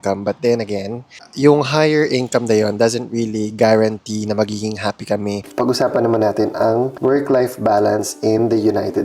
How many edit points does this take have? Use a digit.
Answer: 2